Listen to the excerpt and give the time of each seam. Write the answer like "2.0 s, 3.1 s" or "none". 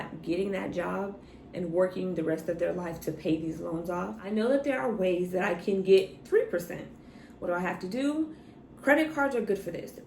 4.2 s